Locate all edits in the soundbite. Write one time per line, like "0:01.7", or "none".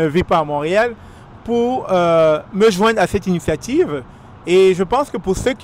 none